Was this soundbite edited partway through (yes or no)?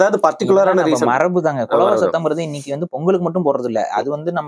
no